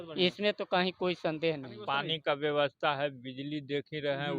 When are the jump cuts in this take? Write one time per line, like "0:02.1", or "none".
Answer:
0:01.8